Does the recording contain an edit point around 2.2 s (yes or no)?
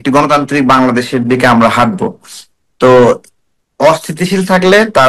no